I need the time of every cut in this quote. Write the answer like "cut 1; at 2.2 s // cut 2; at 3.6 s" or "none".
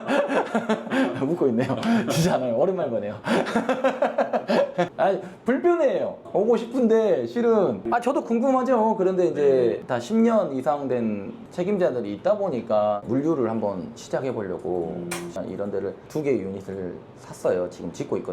cut 1; at 11.4 s // cut 2; at 13.0 s // cut 3; at 15.3 s